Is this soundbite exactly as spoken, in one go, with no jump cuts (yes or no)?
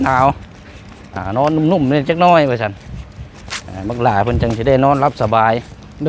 yes